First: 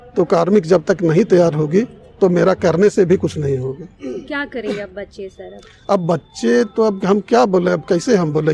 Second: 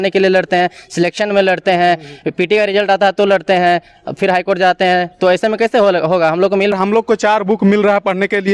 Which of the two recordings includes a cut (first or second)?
second